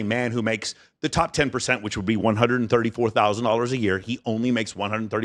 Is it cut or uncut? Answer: uncut